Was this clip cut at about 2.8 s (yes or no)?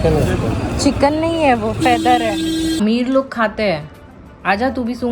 yes